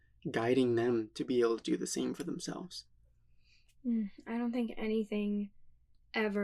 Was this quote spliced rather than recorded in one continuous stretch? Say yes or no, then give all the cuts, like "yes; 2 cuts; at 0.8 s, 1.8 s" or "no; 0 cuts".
no; 0 cuts